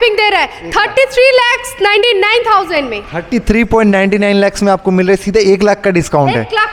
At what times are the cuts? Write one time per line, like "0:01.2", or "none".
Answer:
none